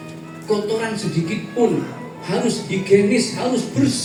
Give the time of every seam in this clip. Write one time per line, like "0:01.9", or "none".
none

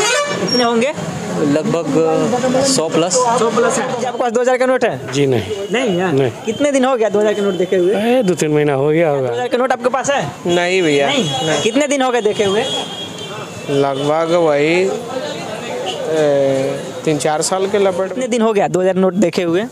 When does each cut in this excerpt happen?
0:04.0
0:09.4
0:18.1

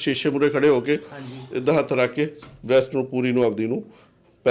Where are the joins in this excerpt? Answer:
none

